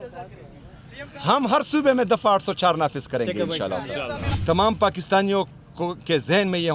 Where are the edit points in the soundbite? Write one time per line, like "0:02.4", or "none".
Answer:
0:04.2